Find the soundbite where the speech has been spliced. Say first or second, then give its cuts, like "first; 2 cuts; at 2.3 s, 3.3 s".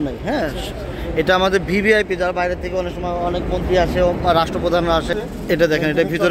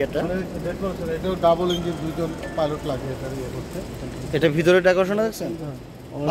first; 1 cut; at 5.1 s